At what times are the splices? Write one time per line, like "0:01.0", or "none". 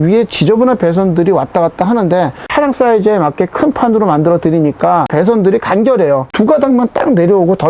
0:02.5
0:05.1
0:06.3